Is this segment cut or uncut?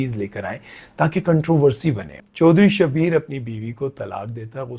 cut